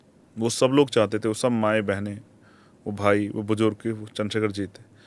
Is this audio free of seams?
yes; 0 cuts

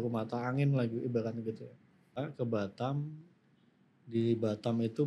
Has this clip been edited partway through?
yes; 1 cut; at 2.2 s

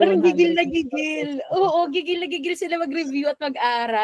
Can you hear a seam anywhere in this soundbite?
no; 0 cuts

